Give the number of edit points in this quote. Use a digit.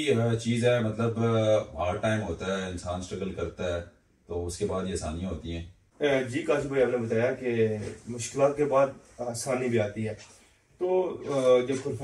0